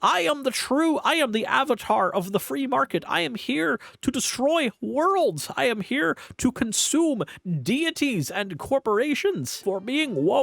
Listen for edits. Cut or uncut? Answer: cut